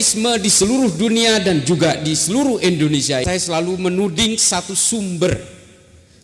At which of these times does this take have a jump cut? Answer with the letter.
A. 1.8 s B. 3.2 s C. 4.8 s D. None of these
B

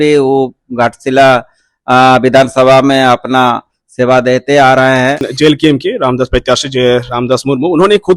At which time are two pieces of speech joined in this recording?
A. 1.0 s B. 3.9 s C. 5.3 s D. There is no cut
C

